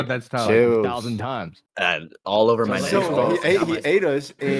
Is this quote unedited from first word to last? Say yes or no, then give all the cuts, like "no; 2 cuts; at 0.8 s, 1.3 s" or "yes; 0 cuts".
no; 1 cut; at 3.2 s